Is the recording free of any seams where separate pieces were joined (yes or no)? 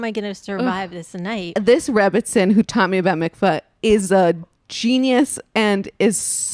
no